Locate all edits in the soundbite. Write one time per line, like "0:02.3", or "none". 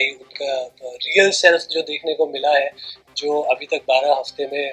none